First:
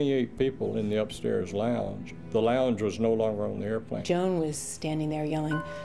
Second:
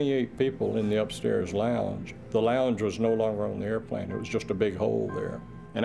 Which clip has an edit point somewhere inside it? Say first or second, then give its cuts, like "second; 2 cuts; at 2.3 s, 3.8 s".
first; 1 cut; at 4.0 s